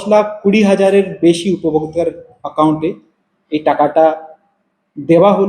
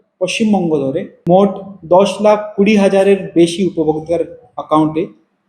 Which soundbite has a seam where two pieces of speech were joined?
second; 1 cut; at 1.1 s

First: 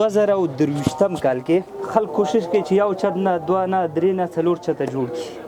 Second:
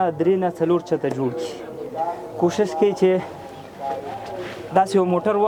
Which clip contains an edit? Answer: first; 1 cut; at 1.8 s

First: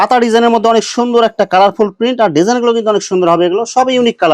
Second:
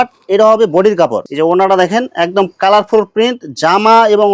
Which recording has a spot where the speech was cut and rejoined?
second; 1 cut; at 1.2 s

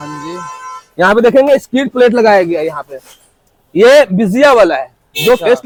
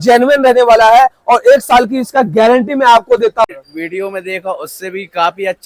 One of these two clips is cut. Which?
second; 1 cut; at 3.5 s

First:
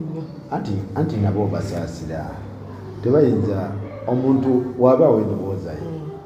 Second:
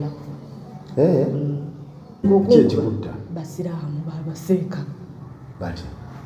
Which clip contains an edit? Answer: second; 1 cut; at 2.2 s

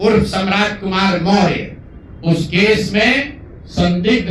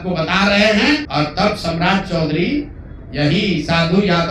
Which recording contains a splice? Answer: second; 1 cut; at 1.1 s

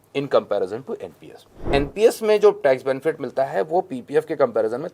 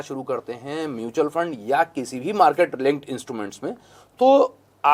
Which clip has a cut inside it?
first; 1 cut; at 1.6 s

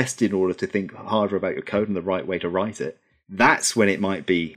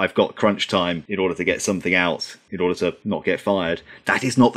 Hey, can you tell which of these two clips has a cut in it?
second; 3 cuts; at 1.0 s, 2.4 s, 3.0 s

